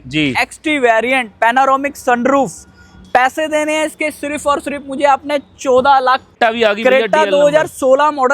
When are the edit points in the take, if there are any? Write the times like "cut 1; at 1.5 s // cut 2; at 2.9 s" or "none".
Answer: cut 1; at 6.3 s